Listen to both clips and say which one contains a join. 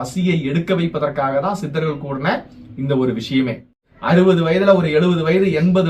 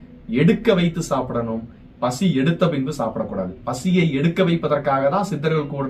first; 1 cut; at 3.8 s

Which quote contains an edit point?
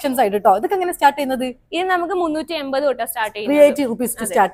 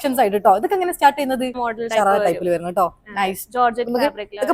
second; 1 cut; at 1.6 s

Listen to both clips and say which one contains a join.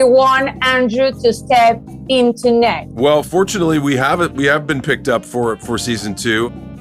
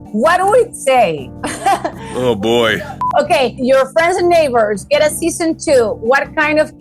second; 1 cut; at 2.8 s

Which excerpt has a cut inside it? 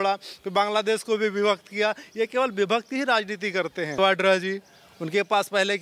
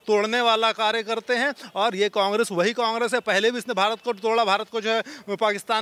first; 1 cut; at 4.0 s

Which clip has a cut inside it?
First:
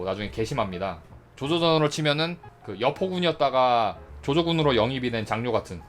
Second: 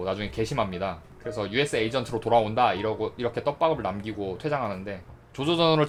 first; 1 cut; at 1.1 s

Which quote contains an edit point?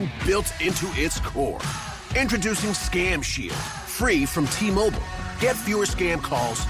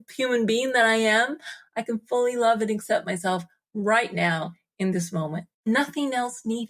second; 1 cut; at 5.6 s

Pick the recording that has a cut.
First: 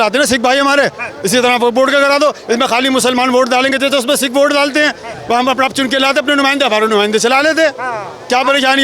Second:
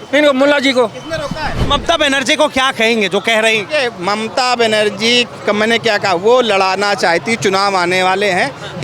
second; 2 cuts; at 1.7 s, 5.3 s

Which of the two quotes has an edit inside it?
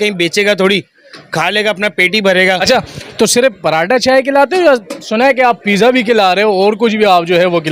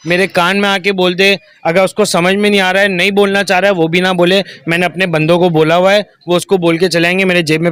first; 1 cut; at 2.6 s

